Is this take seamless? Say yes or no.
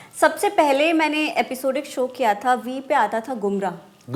yes